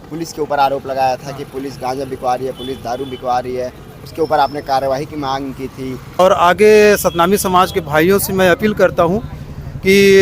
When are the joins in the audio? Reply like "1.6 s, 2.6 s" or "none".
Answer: 6.2 s